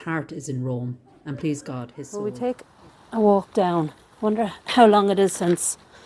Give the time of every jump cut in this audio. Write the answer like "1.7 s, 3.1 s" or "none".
2.0 s